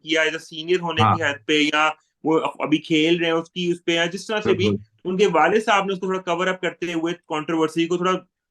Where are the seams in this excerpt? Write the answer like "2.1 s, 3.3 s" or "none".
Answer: none